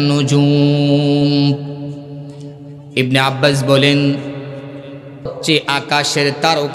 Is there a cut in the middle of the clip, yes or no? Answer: yes